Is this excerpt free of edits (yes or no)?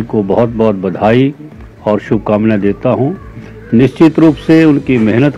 yes